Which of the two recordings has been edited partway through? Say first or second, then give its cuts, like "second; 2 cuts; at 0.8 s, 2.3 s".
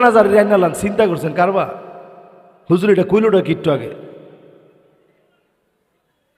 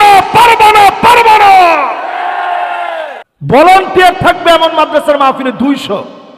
second; 1 cut; at 3.3 s